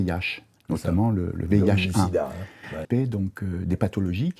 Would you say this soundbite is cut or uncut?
cut